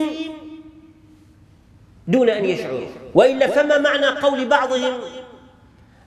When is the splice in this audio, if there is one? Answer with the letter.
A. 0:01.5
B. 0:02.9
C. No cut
B